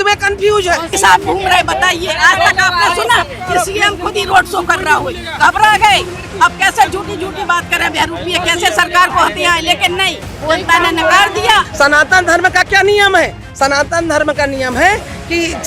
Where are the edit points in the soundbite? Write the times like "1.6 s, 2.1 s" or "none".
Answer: 0.9 s, 11.7 s